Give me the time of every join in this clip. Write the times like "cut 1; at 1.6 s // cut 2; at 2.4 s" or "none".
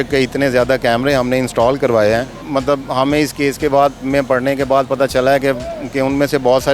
cut 1; at 2.4 s